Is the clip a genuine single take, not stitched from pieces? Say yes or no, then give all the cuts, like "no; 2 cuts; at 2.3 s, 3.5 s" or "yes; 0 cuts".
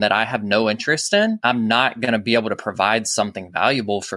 no; 1 cut; at 1.4 s